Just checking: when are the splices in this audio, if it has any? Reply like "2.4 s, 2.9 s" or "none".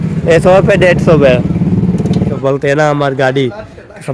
2.3 s